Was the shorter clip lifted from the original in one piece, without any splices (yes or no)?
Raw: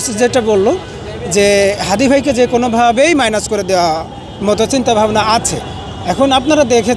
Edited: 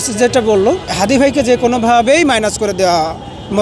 no